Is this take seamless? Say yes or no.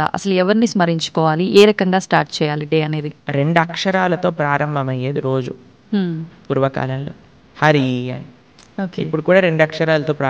no